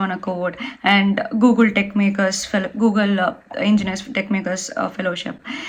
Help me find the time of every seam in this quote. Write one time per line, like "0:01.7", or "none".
none